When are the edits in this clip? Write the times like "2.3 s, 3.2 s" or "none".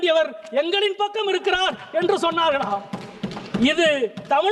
none